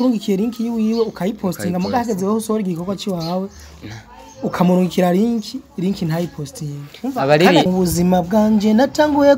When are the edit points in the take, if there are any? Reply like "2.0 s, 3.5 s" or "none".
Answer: 7.7 s